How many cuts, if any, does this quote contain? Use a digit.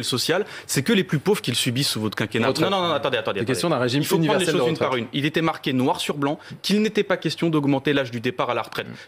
1